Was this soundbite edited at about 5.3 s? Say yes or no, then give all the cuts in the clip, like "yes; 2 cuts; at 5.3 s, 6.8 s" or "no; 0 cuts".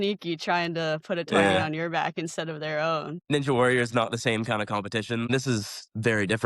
yes; 2 cuts; at 3.1 s, 5.3 s